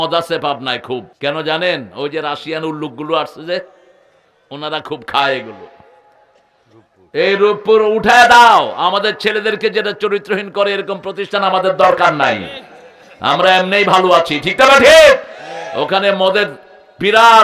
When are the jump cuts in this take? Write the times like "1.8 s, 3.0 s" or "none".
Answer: 1.1 s